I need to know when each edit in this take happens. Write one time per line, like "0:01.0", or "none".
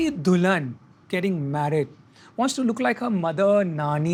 none